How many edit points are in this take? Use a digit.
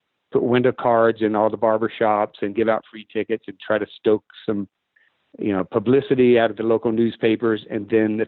0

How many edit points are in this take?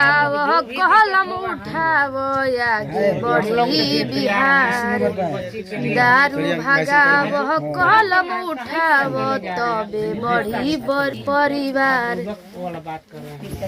0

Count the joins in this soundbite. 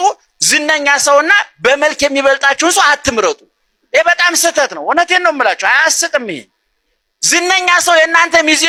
0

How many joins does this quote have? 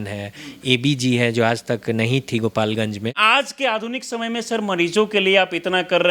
1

